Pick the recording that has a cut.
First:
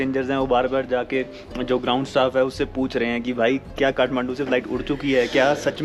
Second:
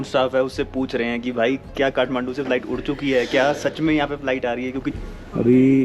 second; 1 cut; at 4.9 s

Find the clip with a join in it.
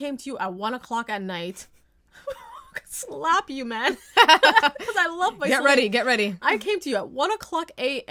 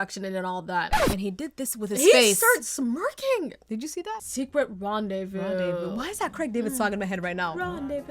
second; 1 cut; at 4.1 s

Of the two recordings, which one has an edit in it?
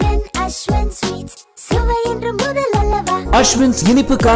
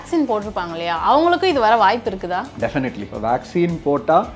second; 1 cut; at 3.1 s

